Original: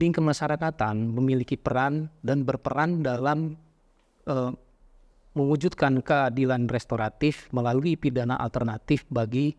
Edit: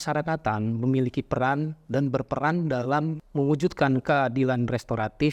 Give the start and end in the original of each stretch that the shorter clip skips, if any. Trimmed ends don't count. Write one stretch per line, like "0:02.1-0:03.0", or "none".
0:03.6-0:05.2